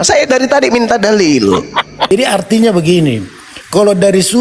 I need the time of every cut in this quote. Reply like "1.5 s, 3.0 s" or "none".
2.1 s